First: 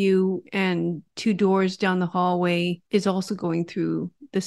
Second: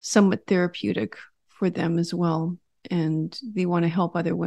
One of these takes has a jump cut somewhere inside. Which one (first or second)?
first